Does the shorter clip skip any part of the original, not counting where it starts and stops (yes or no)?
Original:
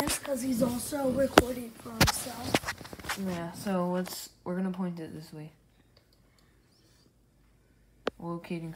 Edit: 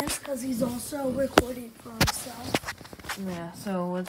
no